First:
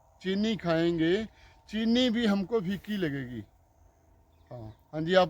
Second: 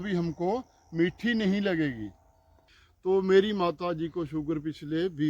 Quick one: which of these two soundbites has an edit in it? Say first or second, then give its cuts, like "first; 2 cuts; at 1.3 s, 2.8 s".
second; 1 cut; at 2.7 s